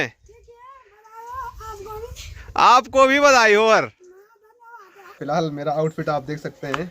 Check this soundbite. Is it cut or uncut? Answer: cut